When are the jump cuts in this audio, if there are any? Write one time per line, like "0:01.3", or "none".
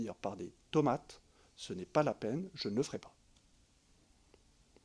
none